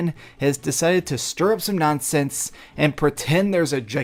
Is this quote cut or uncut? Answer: uncut